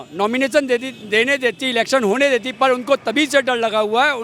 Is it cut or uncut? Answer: uncut